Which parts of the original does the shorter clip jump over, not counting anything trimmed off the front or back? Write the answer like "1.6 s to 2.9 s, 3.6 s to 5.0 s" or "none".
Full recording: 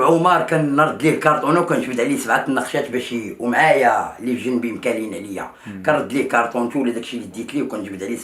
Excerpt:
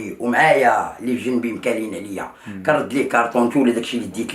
none